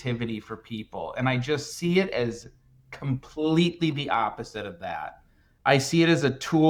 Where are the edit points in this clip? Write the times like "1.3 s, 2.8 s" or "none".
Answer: none